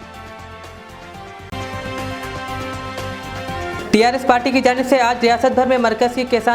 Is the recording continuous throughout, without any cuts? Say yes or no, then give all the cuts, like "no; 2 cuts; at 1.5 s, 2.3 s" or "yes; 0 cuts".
no; 2 cuts; at 1.5 s, 3.8 s